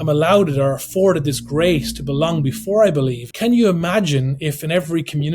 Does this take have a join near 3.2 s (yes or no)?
yes